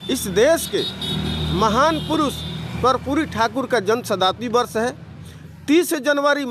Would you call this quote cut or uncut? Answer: uncut